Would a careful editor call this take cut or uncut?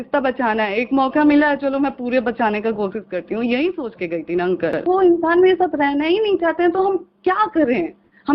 cut